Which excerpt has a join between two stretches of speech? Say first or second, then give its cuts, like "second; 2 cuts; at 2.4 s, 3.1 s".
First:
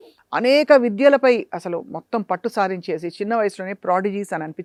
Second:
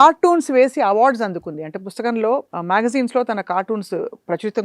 second; 1 cut; at 2.5 s